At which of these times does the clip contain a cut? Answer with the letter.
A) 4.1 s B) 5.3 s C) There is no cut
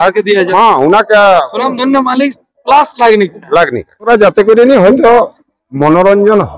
A